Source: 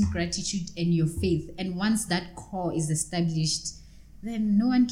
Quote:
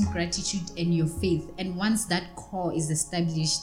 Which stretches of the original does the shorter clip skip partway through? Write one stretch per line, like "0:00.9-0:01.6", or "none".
none